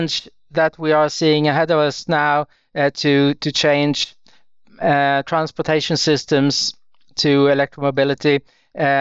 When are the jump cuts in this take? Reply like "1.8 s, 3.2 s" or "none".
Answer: none